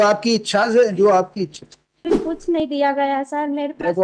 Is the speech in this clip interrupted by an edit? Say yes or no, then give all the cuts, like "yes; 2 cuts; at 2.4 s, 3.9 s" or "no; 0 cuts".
yes; 1 cut; at 2.3 s